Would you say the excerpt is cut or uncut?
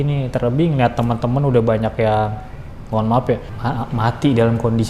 cut